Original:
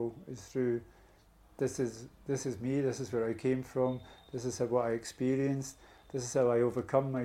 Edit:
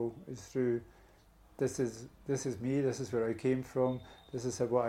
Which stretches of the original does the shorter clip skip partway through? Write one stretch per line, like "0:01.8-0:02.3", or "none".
none

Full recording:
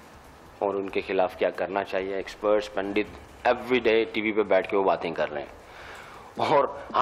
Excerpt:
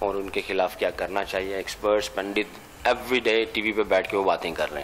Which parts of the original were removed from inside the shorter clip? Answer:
none

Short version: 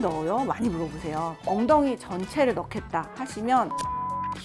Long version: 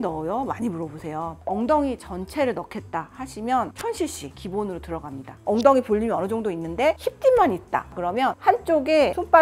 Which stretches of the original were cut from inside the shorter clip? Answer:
none

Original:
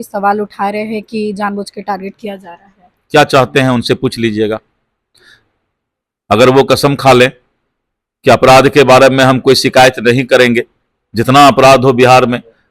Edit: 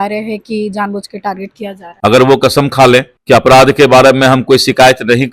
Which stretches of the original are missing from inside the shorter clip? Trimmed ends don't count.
0:02.5-0:06.1
0:07.4-0:08.1

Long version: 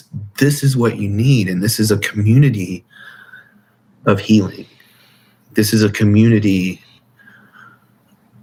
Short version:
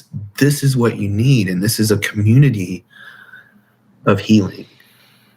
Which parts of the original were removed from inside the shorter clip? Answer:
none

